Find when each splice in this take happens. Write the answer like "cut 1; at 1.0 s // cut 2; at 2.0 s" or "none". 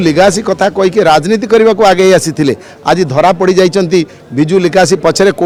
none